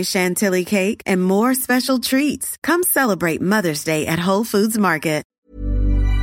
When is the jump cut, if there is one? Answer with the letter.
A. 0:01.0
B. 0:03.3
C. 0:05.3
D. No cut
C